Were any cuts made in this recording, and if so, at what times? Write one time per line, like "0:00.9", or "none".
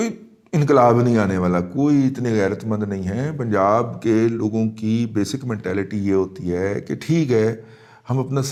none